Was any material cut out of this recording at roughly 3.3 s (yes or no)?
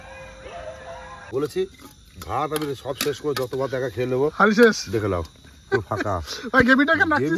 no